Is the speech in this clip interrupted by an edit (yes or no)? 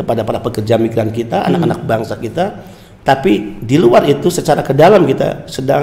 no